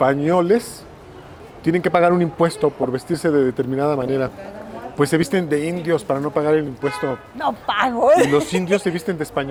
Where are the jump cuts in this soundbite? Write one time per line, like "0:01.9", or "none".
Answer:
none